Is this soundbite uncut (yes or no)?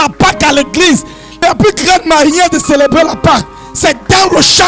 yes